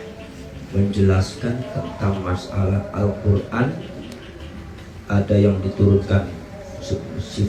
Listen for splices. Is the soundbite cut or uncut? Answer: uncut